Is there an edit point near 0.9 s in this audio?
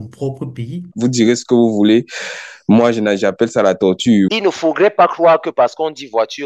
yes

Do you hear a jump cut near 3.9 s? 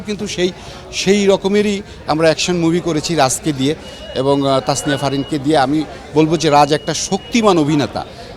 no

